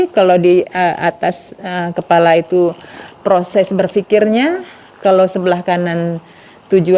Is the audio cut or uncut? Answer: uncut